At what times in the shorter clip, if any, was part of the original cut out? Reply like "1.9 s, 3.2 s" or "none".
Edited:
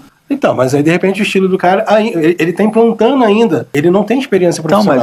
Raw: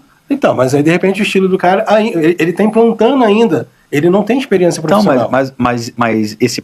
3.7 s